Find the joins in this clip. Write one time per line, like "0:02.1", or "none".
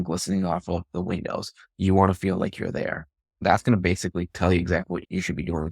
0:03.4